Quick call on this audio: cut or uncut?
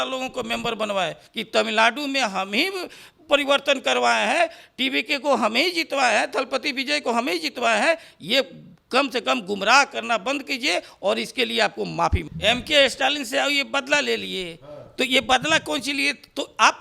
cut